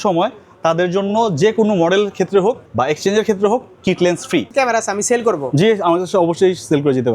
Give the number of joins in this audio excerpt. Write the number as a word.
two